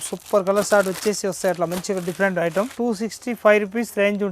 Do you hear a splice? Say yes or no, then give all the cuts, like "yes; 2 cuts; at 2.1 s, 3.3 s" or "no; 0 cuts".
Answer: yes; 1 cut; at 2.7 s